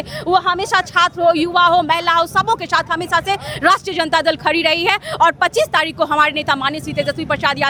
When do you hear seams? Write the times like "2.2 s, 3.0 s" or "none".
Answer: none